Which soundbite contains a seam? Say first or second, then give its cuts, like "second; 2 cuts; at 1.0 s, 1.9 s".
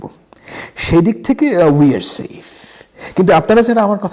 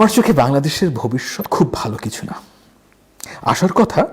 second; 1 cut; at 1.4 s